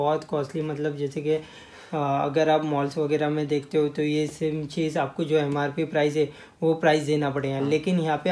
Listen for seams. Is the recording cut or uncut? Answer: uncut